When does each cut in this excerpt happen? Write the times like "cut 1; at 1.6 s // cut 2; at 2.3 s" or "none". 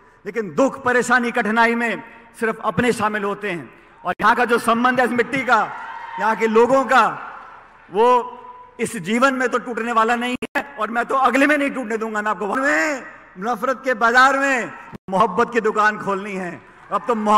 cut 1; at 12.6 s

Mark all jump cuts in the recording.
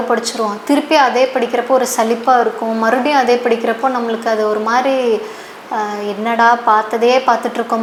none

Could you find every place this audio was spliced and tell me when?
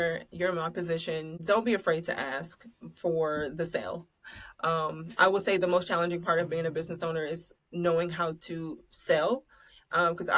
cut 1; at 1.3 s

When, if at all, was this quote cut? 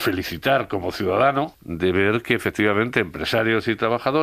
cut 1; at 1.6 s

